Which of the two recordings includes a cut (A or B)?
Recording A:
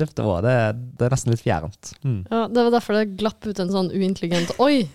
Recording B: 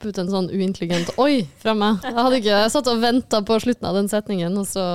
A